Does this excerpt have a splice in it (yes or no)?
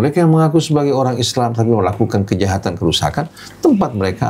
no